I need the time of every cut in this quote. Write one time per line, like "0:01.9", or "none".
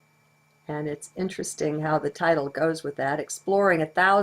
0:01.7